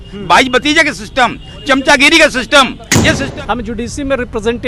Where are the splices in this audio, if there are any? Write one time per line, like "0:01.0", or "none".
0:03.3